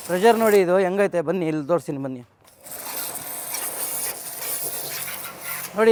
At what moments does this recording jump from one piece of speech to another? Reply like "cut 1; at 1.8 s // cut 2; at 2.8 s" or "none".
none